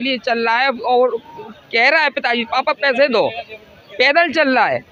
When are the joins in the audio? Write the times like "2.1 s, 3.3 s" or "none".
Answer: none